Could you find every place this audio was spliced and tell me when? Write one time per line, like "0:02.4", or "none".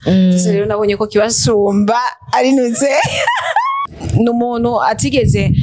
0:03.8